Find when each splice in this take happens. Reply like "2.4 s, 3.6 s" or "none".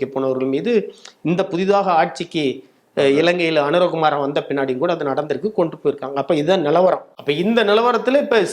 7.1 s